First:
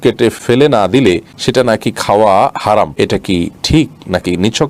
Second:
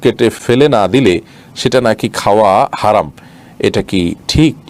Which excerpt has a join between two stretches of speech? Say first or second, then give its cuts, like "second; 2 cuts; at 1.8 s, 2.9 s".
first; 2 cuts; at 1.3 s, 3.4 s